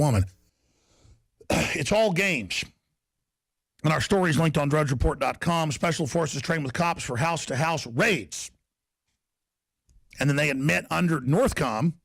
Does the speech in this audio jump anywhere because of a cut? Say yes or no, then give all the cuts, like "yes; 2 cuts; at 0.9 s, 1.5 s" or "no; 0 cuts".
yes; 1 cut; at 6.2 s